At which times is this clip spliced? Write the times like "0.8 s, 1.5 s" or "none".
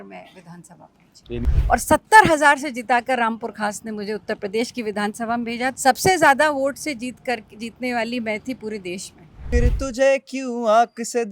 1.4 s, 5.7 s, 9.4 s